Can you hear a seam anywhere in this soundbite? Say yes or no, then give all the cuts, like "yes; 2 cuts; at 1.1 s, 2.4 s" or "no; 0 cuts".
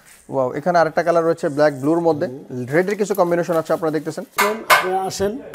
yes; 1 cut; at 4.3 s